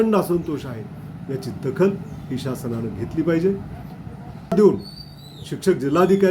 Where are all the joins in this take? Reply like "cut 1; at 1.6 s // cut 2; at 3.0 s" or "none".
cut 1; at 4.5 s